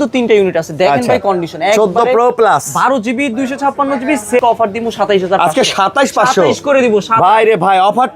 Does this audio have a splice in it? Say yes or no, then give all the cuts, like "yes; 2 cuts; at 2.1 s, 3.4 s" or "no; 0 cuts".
yes; 1 cut; at 4.4 s